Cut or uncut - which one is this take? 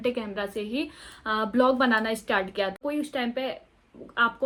uncut